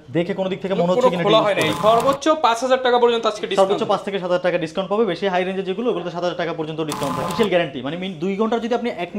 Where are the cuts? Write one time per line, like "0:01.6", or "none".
0:01.8
0:07.3